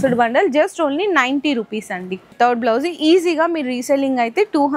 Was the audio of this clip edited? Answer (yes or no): yes